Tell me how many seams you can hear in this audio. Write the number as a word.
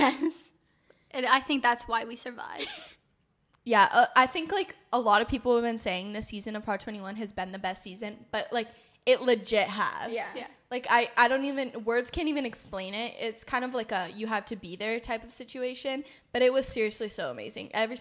zero